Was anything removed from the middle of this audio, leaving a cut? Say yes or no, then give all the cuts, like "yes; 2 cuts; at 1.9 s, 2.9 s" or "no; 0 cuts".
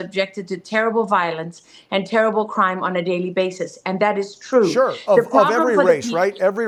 no; 0 cuts